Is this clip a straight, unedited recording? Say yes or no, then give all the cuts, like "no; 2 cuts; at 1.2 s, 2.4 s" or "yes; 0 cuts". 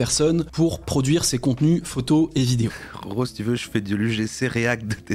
no; 1 cut; at 2.8 s